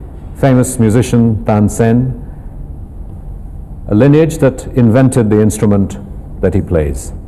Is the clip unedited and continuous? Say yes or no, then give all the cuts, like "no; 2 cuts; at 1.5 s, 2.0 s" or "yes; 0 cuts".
no; 1 cut; at 3.4 s